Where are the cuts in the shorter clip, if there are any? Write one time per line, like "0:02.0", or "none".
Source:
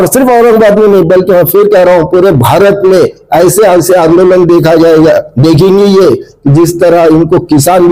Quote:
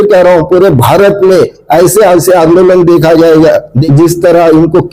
0:03.7